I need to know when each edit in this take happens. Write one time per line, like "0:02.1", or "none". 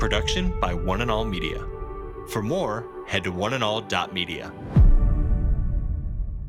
none